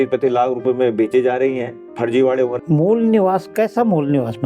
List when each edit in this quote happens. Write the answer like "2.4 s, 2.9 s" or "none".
2.6 s